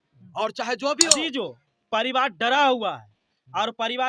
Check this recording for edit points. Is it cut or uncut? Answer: cut